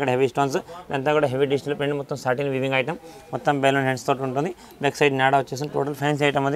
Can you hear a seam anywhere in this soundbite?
no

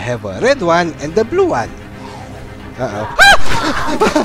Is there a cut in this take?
no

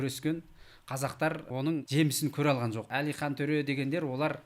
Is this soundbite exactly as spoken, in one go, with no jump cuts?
no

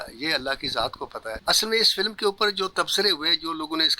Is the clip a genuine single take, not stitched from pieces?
no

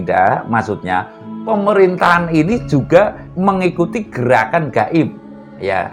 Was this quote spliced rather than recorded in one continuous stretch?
yes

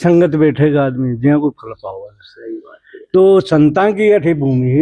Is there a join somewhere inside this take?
no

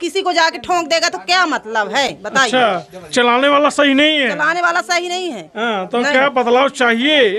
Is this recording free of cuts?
yes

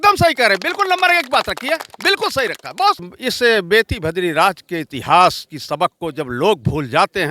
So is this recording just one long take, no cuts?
no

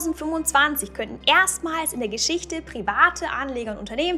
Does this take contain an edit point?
no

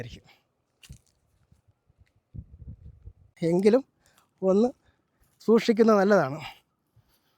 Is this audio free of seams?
no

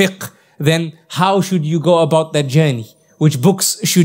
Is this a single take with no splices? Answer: yes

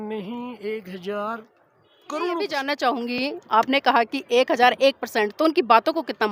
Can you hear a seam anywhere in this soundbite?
yes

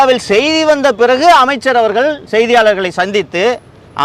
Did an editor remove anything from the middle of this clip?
no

